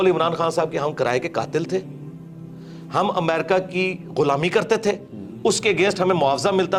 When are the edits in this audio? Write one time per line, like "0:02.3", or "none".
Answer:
none